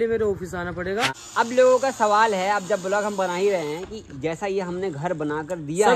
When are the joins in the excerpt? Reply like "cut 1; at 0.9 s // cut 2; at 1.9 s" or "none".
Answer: cut 1; at 1.2 s